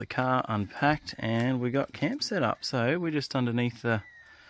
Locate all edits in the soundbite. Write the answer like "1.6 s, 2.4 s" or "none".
none